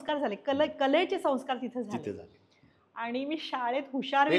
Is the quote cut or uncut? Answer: uncut